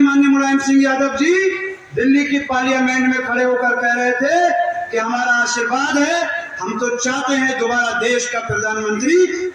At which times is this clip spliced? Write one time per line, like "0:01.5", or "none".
none